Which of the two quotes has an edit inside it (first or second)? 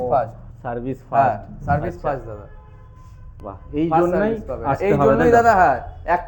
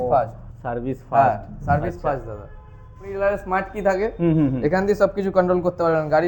second